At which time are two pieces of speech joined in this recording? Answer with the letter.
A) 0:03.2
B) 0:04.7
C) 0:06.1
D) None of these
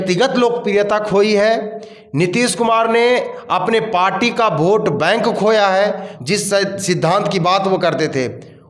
C